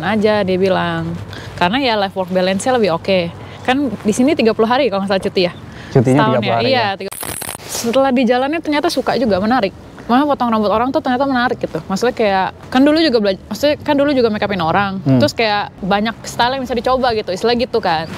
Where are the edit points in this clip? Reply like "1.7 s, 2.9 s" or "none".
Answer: 7.2 s, 12.6 s, 15.8 s

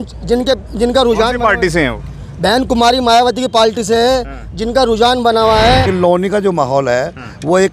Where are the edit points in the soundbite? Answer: 5.9 s

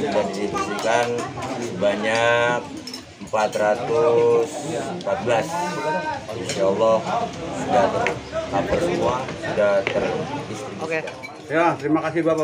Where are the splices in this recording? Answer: 11.1 s

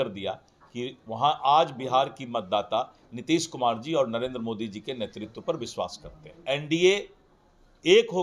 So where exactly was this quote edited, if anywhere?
6.3 s

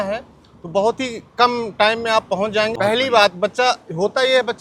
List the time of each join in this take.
2.7 s

